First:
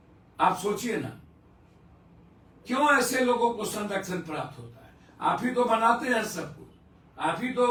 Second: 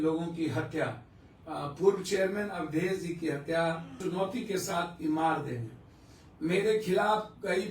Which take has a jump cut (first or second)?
second